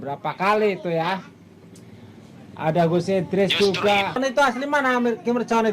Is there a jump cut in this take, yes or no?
yes